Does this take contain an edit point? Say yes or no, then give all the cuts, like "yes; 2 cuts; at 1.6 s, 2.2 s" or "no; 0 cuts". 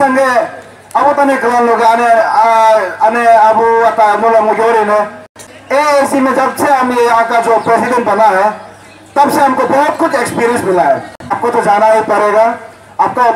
yes; 2 cuts; at 5.4 s, 11.4 s